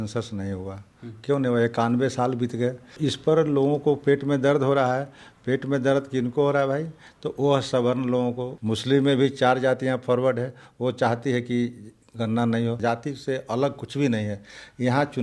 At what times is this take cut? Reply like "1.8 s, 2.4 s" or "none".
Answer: 2.9 s, 8.5 s, 12.8 s